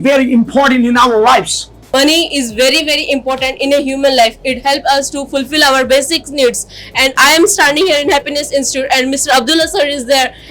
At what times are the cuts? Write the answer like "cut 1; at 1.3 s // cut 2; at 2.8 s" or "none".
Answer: cut 1; at 1.8 s